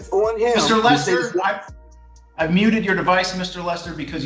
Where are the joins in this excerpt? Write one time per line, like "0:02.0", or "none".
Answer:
none